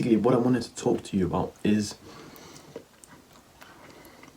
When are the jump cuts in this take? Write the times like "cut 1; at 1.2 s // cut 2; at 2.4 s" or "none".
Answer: none